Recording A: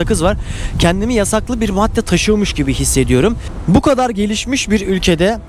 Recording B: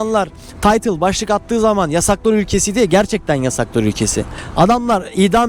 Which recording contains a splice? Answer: A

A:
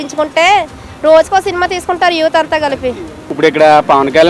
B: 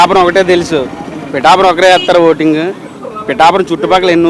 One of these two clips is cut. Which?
A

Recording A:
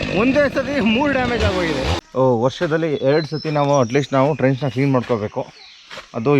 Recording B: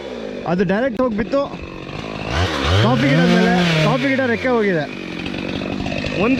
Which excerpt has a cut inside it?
A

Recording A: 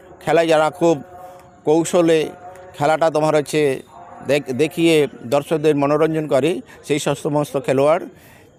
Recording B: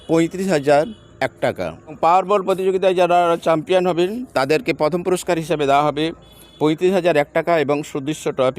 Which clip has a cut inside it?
B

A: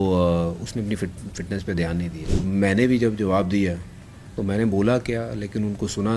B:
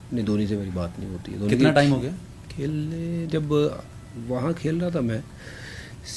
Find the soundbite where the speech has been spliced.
A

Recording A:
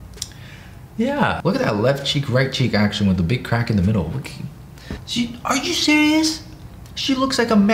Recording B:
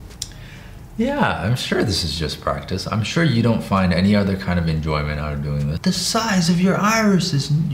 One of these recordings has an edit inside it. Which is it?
A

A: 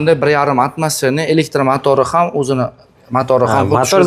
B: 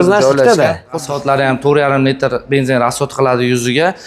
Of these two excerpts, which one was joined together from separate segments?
B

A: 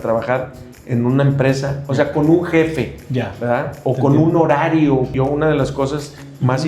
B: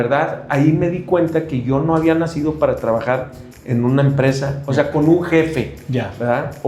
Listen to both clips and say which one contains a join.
A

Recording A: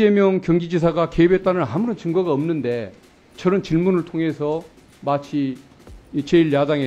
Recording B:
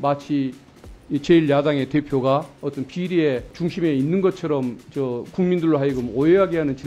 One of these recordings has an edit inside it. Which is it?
B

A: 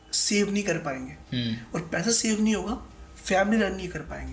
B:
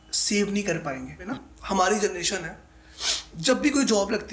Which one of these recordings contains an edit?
B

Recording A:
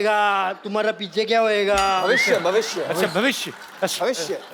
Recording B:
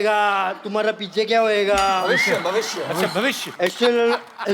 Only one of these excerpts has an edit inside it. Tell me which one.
B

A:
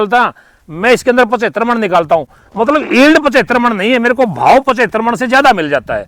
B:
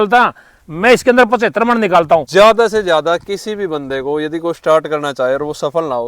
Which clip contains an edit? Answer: B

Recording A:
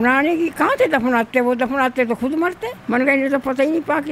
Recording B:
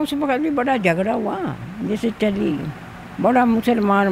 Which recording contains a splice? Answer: A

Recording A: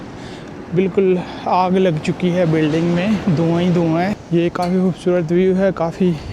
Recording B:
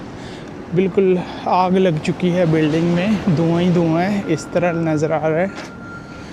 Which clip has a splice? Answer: A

